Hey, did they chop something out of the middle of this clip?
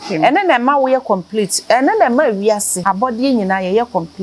yes; 1 cut; at 2.7 s

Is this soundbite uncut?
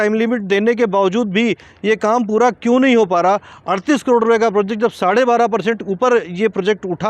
yes; 0 cuts

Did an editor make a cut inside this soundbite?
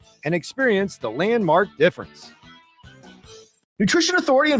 yes; 1 cut; at 3.6 s

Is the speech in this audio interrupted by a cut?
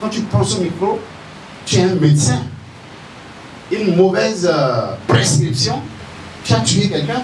no; 0 cuts

